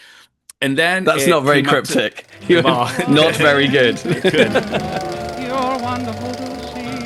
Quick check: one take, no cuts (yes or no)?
no